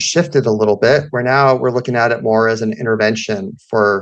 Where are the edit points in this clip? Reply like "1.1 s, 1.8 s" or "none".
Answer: none